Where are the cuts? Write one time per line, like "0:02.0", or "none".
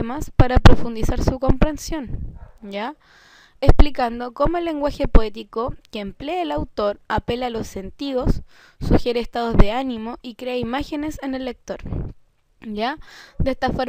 0:03.9